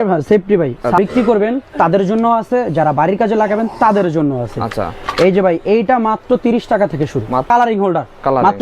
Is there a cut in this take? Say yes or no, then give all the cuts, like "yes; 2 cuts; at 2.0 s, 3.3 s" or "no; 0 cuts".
yes; 2 cuts; at 1.0 s, 7.5 s